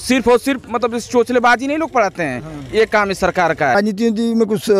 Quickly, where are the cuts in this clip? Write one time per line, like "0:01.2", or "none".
0:03.8